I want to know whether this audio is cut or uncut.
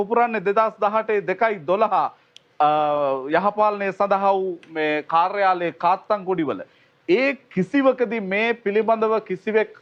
uncut